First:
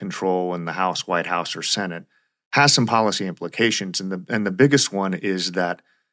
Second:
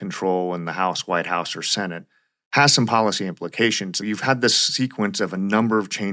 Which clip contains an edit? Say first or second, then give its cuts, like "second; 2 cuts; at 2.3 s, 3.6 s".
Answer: second; 1 cut; at 4.0 s